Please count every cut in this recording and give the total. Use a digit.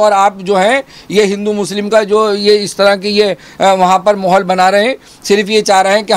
0